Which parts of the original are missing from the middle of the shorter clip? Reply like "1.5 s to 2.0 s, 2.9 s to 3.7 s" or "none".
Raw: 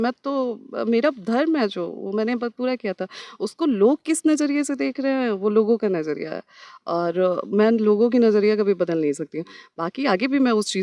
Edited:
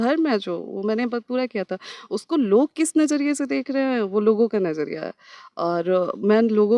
none